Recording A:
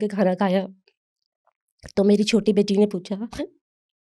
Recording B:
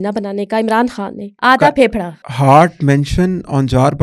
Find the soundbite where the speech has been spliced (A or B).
B